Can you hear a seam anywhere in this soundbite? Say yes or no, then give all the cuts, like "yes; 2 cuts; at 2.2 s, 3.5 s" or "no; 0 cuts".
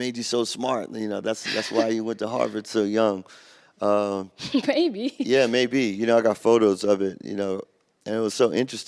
yes; 1 cut; at 6.7 s